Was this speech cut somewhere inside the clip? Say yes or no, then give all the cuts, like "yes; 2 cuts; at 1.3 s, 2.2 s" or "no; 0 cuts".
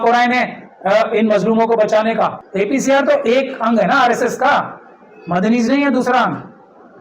yes; 1 cut; at 2.4 s